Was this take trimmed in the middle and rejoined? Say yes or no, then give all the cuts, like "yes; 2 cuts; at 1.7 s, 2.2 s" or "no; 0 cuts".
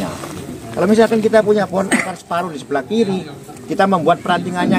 no; 0 cuts